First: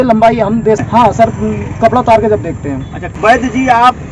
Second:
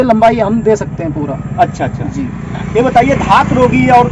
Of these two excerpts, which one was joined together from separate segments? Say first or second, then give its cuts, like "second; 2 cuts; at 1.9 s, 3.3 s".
first; 2 cuts; at 0.9 s, 3.1 s